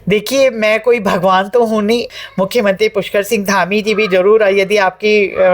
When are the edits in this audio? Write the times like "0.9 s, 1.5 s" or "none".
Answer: 2.2 s